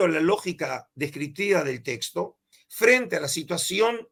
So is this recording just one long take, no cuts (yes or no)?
yes